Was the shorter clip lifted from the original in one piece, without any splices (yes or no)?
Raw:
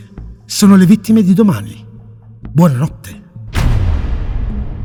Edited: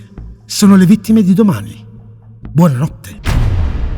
no